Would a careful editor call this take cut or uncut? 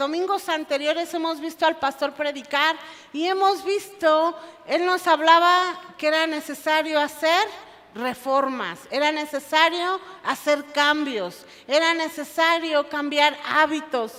uncut